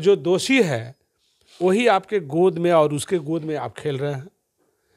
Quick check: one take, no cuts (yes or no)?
yes